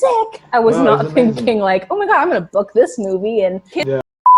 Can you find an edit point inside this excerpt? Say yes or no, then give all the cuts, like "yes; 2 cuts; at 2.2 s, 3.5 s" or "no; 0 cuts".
no; 0 cuts